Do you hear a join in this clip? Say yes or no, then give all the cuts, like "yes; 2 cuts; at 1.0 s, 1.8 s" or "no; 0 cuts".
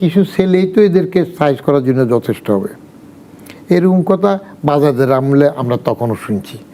no; 0 cuts